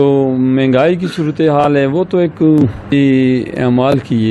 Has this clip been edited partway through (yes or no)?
yes